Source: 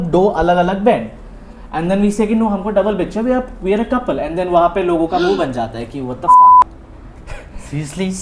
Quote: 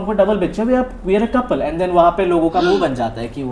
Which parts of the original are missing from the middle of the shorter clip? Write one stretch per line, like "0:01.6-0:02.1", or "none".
none